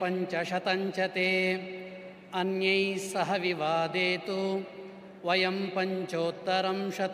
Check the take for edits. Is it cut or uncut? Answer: uncut